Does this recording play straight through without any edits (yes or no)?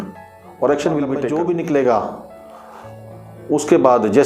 no